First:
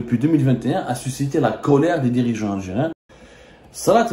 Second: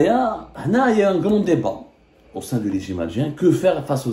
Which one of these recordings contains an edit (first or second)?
first